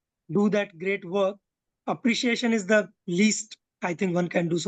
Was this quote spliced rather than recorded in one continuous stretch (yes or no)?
no